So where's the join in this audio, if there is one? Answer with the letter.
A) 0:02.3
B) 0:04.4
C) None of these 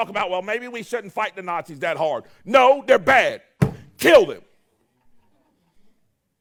C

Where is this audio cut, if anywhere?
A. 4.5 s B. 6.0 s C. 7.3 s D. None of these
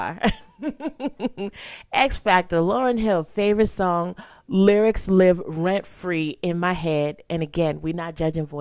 D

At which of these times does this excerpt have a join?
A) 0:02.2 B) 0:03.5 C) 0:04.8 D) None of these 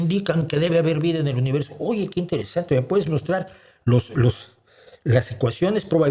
D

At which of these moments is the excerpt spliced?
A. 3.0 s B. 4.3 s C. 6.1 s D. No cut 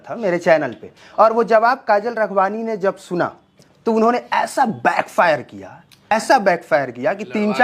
C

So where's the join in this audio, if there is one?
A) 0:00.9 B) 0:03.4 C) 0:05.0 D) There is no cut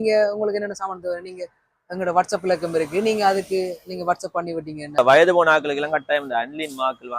C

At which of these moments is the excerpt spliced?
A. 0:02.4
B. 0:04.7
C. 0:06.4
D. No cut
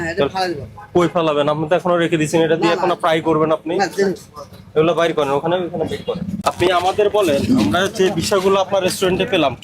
C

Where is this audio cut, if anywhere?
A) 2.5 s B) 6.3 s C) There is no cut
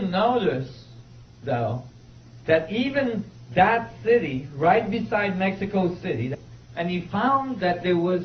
C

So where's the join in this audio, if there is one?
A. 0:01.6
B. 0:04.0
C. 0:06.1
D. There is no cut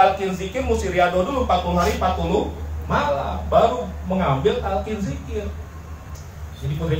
C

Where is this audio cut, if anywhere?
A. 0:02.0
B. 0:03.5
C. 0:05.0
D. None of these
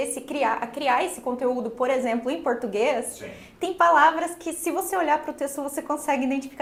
D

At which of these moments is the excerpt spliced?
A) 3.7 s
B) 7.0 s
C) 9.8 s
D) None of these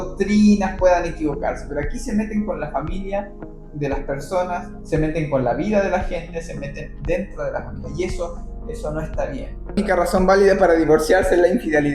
C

